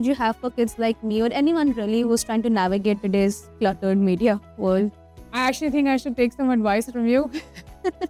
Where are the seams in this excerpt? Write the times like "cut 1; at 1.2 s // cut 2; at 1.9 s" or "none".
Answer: none